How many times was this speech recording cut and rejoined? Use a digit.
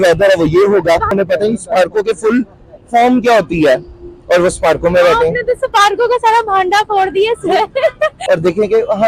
2